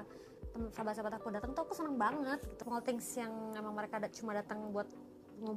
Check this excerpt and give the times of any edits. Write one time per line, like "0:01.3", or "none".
0:02.5